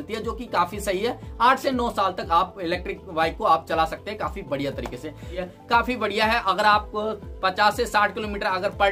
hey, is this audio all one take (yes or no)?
yes